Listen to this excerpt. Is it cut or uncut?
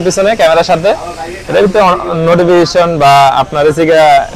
uncut